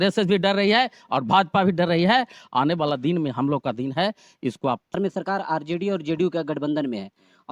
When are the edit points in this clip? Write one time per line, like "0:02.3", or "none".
0:05.0

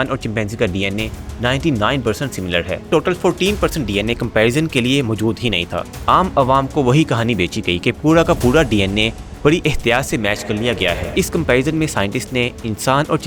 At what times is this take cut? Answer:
0:02.9
0:05.7
0:11.0

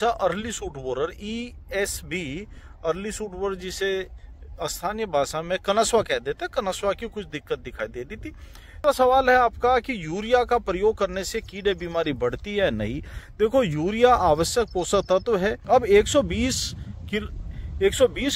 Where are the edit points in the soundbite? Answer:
0:08.8
0:15.6

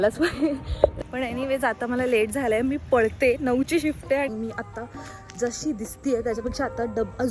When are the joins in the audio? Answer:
0:00.9
0:04.3

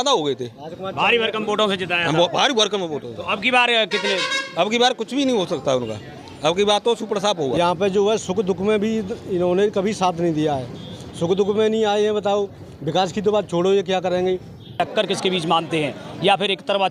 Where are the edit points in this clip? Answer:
0:07.5
0:14.7

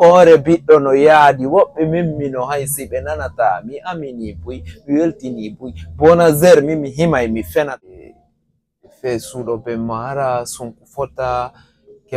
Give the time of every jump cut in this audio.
0:07.8

